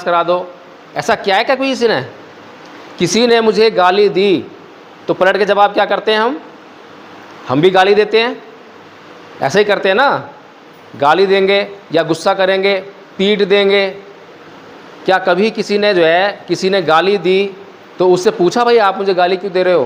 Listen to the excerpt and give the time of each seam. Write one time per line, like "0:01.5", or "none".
none